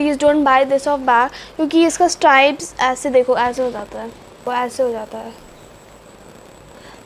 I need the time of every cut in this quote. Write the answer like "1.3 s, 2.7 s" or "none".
4.4 s